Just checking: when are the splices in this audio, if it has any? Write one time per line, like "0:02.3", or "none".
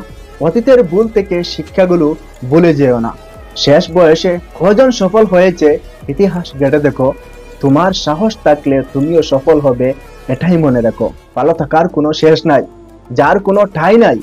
0:11.2